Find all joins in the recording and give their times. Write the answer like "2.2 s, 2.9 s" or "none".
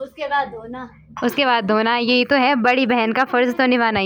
none